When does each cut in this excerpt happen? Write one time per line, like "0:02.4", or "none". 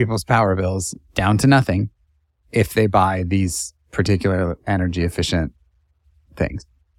none